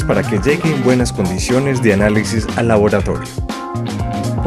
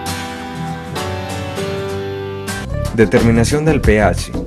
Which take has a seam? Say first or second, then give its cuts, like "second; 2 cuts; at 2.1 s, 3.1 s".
first; 1 cut; at 2.3 s